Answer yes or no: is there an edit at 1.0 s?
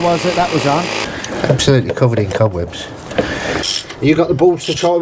yes